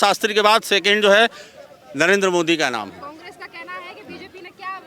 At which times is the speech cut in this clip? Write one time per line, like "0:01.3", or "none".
none